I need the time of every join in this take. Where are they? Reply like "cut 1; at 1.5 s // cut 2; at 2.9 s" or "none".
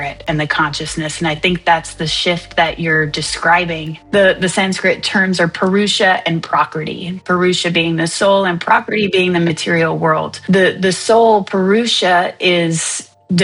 cut 1; at 3.9 s // cut 2; at 10.3 s